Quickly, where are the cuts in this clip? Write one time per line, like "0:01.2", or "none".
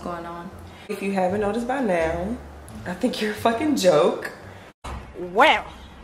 0:01.0